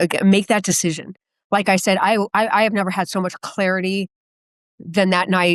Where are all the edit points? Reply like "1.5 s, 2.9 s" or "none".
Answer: none